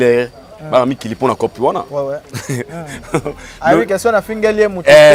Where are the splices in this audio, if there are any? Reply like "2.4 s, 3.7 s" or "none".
none